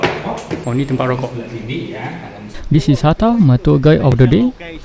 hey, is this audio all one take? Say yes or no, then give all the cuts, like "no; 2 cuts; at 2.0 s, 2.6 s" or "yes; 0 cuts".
no; 1 cut; at 2.5 s